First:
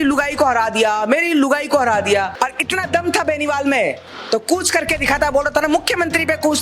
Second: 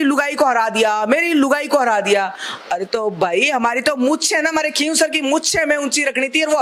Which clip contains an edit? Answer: first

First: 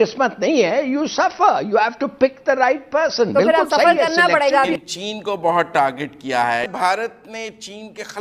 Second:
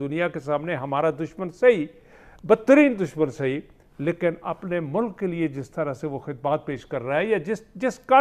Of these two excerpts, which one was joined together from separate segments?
first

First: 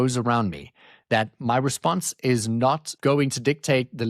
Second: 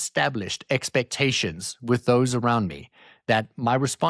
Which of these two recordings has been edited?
first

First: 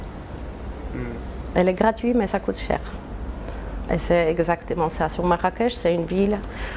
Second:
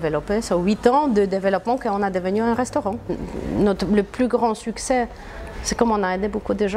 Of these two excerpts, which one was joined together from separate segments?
second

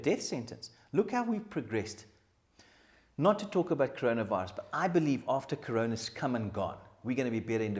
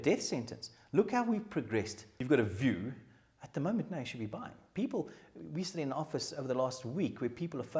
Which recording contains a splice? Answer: second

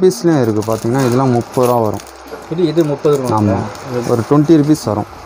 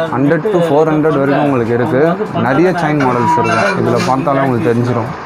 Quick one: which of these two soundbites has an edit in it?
first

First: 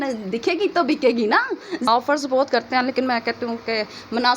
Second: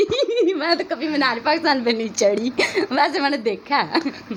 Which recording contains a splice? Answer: first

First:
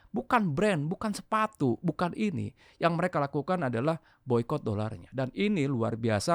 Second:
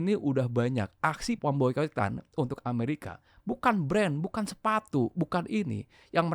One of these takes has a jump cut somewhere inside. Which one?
second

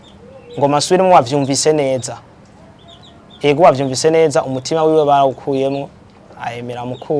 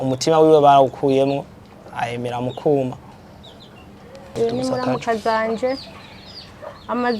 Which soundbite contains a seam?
second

